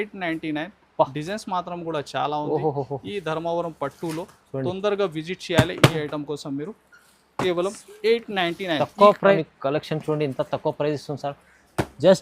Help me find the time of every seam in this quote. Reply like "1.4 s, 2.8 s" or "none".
9.4 s